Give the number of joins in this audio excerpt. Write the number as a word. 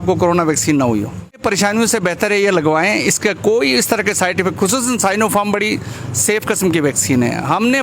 one